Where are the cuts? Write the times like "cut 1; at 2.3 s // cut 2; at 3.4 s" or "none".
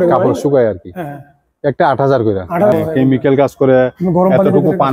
cut 1; at 2.7 s